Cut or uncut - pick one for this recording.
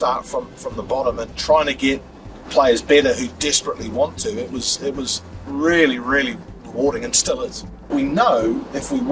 cut